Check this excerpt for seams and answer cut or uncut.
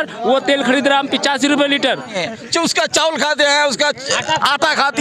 cut